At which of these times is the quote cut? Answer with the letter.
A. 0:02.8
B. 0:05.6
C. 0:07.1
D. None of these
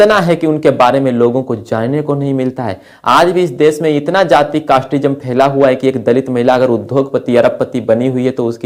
D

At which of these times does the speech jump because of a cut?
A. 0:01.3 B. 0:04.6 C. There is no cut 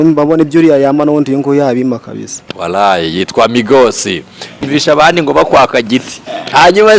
B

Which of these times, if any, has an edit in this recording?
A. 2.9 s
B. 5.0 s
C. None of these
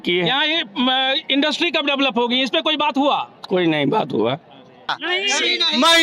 B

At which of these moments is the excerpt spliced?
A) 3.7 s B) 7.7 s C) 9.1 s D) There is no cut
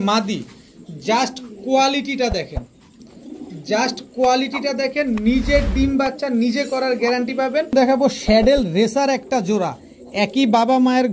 B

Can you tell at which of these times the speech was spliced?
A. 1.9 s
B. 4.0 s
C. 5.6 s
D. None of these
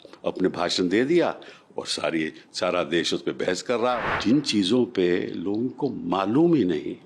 B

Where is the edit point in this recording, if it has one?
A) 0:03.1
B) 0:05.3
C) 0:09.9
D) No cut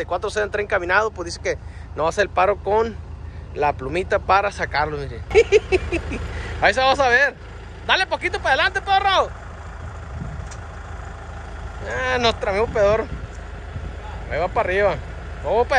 B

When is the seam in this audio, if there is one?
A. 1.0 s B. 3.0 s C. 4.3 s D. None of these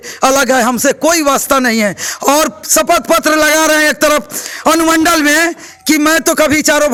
D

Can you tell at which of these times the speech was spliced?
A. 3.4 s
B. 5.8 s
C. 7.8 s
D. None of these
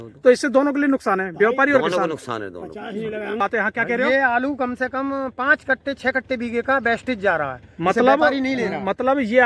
A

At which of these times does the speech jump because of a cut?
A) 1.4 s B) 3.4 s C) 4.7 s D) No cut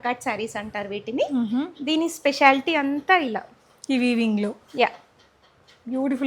D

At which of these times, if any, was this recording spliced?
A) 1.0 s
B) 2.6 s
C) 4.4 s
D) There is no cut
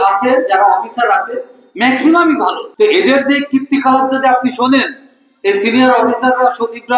B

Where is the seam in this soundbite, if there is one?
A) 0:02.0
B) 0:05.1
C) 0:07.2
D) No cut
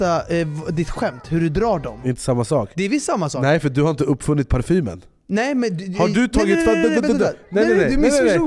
A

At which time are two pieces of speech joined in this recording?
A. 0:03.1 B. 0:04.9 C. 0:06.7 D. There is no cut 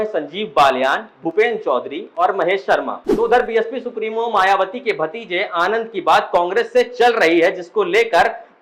A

